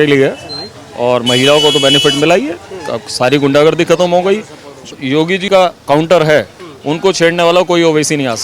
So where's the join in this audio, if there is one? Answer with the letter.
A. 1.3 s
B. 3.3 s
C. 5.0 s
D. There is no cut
C